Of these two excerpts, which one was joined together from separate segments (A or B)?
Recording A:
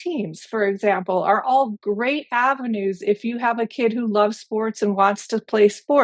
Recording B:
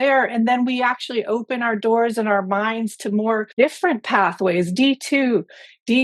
B